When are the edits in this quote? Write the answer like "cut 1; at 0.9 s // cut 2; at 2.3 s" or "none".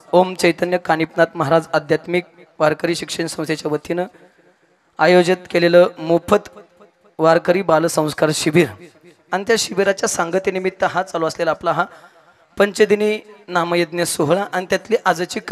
none